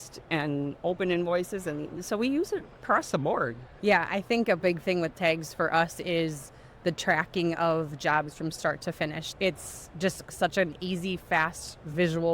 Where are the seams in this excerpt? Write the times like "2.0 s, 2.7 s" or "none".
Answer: 3.6 s, 9.2 s

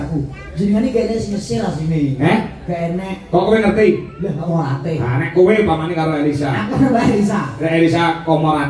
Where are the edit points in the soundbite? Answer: 4.5 s

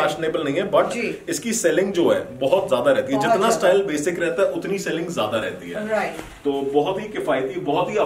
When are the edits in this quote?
none

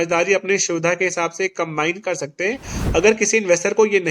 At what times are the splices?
2.7 s

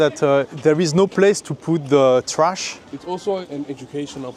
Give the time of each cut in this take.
none

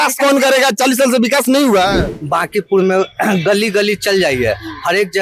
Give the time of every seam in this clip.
2.1 s

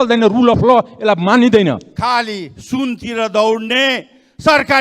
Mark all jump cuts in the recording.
1.9 s

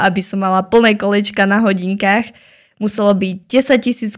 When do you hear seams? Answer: none

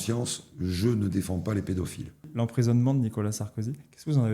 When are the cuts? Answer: 2.3 s

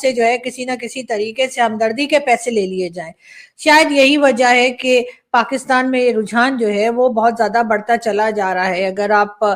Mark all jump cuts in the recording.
none

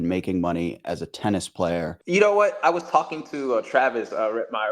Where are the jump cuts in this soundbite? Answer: 2.0 s

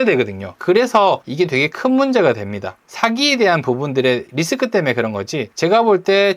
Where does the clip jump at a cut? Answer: 1.3 s, 5.4 s

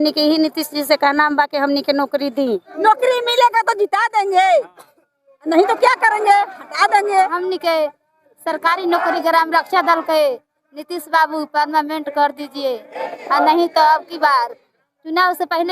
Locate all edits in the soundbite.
2.7 s, 7.4 s

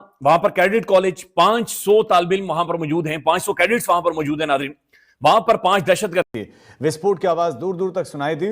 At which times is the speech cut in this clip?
6.3 s

